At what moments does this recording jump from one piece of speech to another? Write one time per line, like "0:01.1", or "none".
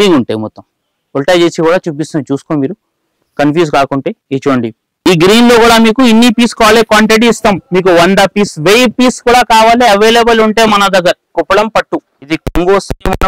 0:04.8
0:11.2